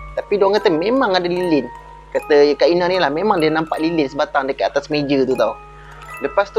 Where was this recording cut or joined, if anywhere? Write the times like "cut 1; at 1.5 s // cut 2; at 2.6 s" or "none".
cut 1; at 5.6 s